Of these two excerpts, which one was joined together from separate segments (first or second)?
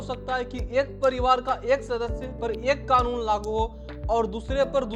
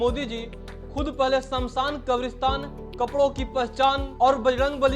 second